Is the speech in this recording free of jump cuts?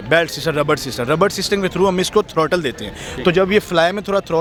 yes; 0 cuts

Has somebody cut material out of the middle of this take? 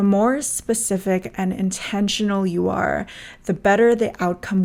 no; 0 cuts

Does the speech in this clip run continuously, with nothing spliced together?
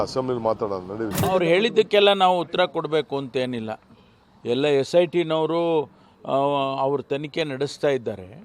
no; 1 cut; at 1.1 s

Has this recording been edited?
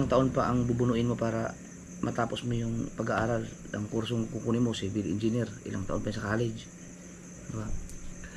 no; 0 cuts

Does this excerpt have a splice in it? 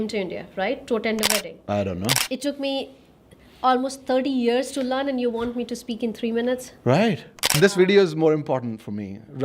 yes; 2 cuts; at 2.2 s, 7.6 s

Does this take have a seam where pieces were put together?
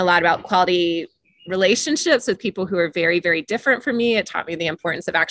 no; 0 cuts

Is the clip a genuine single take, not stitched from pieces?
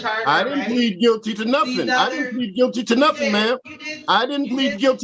yes; 0 cuts

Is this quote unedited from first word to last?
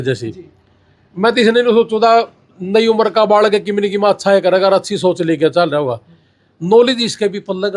yes; 0 cuts

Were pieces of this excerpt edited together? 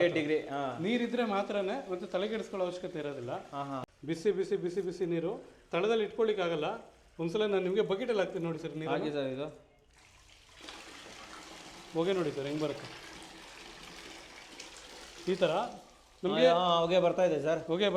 yes; 1 cut; at 3.8 s

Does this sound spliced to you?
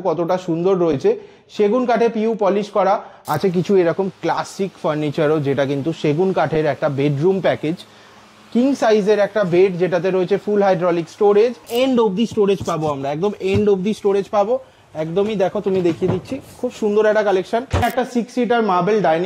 yes; 3 cuts; at 3.1 s, 11.7 s, 17.8 s

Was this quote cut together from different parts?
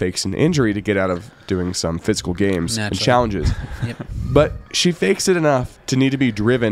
no; 0 cuts

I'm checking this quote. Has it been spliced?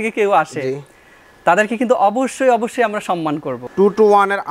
yes; 1 cut; at 3.6 s

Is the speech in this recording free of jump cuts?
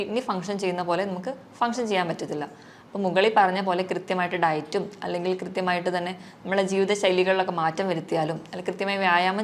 yes; 0 cuts

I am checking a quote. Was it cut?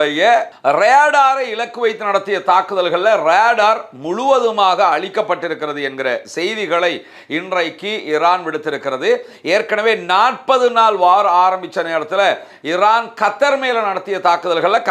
no; 0 cuts

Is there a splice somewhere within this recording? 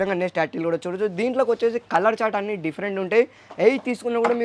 no; 0 cuts

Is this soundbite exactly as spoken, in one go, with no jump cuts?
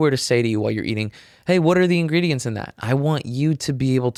yes; 0 cuts

